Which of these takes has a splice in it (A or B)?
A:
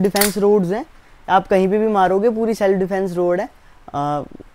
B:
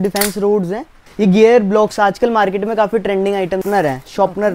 B